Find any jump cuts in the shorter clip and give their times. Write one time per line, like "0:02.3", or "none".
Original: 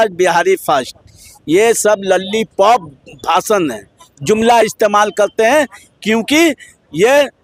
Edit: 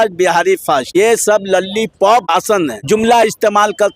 0:00.9
0:02.5